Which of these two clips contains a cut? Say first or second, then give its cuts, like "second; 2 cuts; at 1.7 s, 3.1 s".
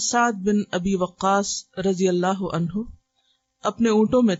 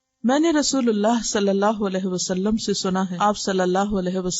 second; 1 cut; at 3.1 s